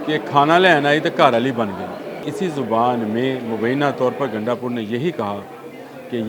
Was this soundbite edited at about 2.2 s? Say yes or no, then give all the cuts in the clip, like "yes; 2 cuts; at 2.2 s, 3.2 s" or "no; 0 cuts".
yes; 1 cut; at 2.2 s